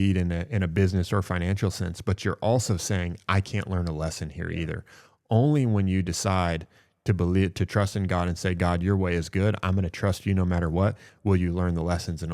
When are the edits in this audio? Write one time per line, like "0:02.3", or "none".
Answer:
0:11.1

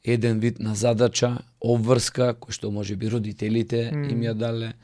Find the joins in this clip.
none

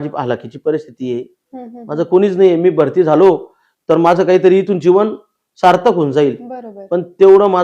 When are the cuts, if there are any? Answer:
none

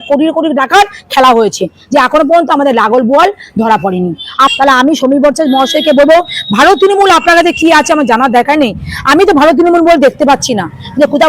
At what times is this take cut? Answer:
0:04.5

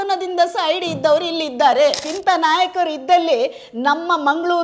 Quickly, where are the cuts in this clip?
0:02.1

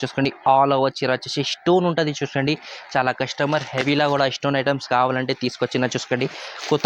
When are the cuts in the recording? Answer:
none

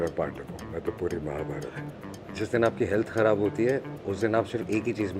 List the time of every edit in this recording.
0:01.8

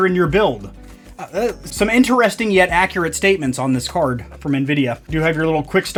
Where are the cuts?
none

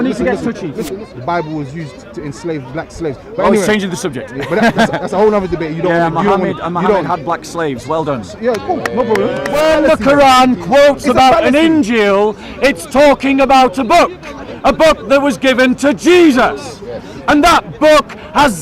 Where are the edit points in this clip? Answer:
0:00.9
0:09.5

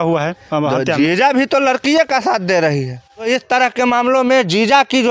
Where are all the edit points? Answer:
0:03.3

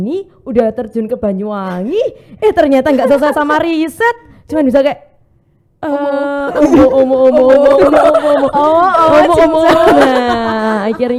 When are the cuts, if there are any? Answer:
none

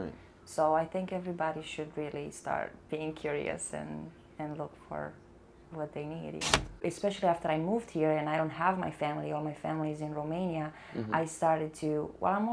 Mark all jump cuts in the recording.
0:06.8

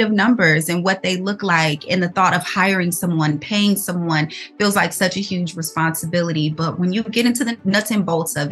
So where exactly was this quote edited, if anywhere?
0:07.5

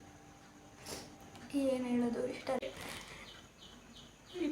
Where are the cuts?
0:02.6

